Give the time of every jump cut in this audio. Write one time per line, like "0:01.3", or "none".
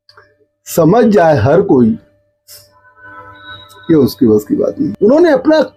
0:04.9